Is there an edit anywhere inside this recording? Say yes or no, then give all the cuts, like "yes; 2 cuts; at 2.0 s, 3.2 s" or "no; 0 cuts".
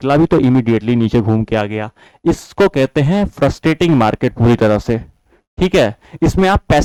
no; 0 cuts